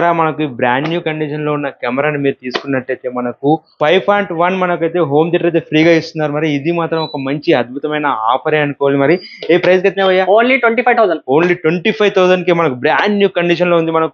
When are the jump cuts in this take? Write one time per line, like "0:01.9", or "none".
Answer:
none